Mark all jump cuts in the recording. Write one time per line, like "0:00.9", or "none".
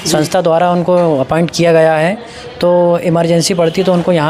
none